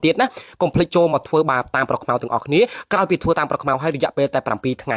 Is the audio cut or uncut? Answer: uncut